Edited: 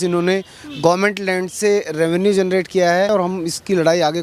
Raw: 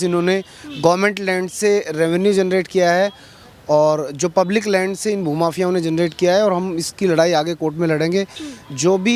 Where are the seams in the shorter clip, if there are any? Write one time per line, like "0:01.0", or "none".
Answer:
0:03.1